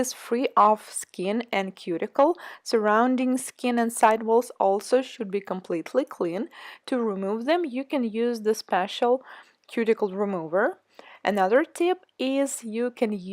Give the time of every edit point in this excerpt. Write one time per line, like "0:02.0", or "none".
0:03.5